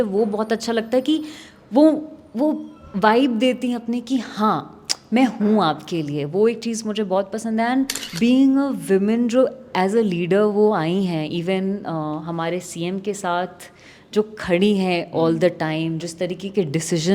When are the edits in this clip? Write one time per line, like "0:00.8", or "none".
0:08.0

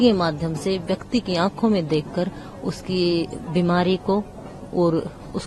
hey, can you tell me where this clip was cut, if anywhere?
none

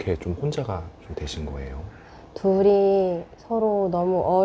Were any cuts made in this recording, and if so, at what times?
0:02.1

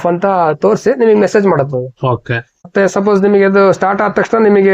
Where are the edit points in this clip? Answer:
0:02.7

